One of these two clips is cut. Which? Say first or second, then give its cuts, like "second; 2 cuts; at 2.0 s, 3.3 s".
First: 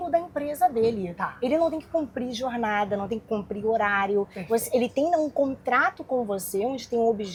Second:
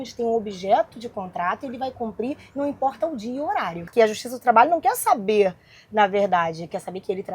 second; 1 cut; at 3.8 s